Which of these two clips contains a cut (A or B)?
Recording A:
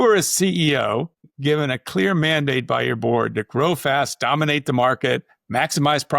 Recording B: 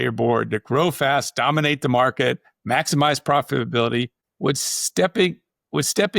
A